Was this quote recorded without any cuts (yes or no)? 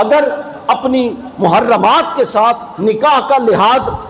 yes